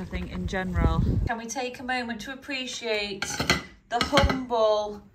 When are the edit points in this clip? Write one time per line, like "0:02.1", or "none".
0:01.2